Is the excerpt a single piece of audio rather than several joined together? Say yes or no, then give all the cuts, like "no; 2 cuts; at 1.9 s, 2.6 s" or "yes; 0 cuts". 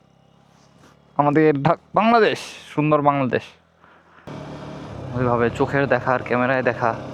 no; 1 cut; at 4.3 s